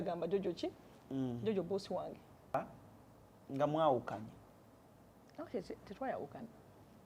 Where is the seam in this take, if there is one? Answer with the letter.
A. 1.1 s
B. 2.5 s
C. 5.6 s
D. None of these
B